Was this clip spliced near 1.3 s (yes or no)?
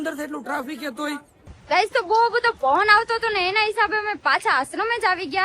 yes